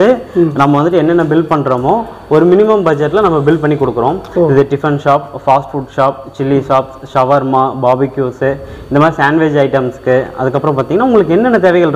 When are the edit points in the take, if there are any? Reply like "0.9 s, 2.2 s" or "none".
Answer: none